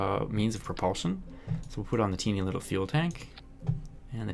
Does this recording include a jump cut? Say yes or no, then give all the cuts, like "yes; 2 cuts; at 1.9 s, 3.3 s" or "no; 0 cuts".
no; 0 cuts